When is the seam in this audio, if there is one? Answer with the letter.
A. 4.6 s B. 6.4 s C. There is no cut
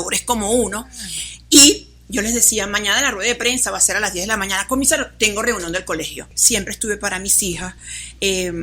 B